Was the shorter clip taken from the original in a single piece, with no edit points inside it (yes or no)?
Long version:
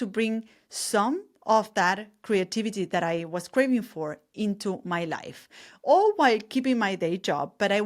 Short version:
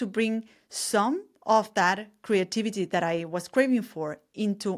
yes